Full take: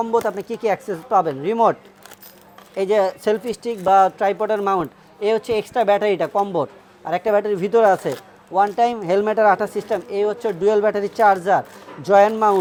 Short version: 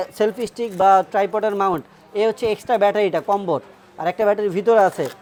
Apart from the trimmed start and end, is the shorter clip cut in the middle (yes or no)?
no